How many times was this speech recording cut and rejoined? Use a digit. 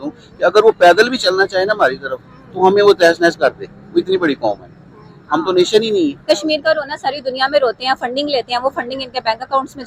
1